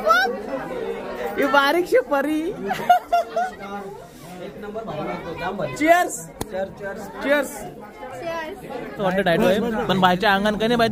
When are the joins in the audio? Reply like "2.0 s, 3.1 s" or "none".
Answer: 9.0 s

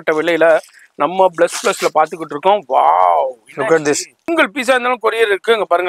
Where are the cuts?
4.1 s

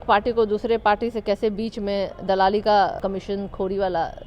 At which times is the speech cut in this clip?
3.0 s

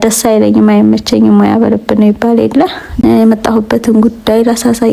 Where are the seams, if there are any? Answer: 2.9 s

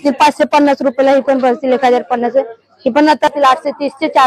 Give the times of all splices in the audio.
3.3 s

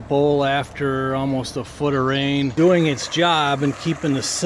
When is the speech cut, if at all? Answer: 2.5 s

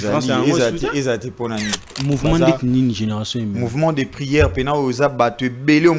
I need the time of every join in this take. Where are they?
2.0 s

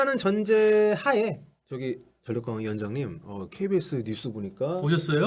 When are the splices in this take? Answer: 1.7 s

